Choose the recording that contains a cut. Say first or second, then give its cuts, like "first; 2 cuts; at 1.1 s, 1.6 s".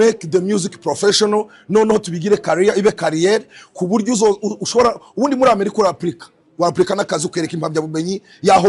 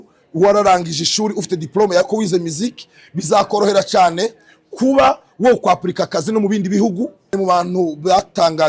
second; 1 cut; at 7.3 s